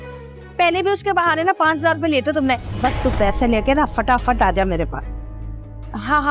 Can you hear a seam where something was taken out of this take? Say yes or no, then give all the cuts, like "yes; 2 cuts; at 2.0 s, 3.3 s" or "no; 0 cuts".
yes; 1 cut; at 2.7 s